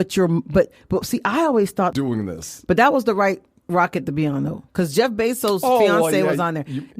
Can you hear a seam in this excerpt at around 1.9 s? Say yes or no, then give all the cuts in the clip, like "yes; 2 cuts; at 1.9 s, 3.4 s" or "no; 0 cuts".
yes; 1 cut; at 1.9 s